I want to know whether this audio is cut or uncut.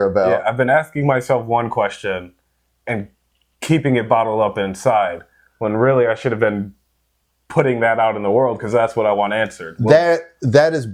uncut